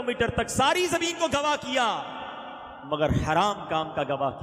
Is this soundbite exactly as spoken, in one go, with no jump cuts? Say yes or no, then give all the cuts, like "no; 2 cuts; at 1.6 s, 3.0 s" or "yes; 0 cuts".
yes; 0 cuts